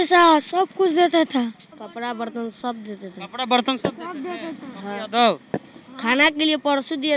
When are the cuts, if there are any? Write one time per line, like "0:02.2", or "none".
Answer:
0:01.8